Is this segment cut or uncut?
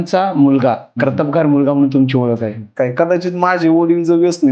cut